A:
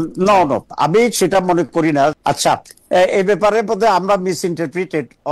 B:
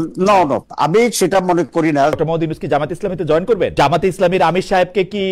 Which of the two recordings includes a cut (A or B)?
B